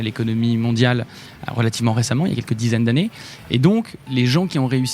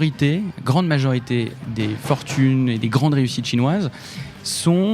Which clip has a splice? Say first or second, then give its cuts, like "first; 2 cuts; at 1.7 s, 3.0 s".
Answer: first; 1 cut; at 4.0 s